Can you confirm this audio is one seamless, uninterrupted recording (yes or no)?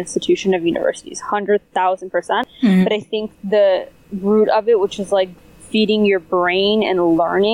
no